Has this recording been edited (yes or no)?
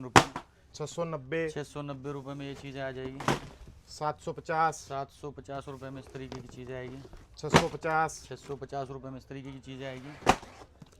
no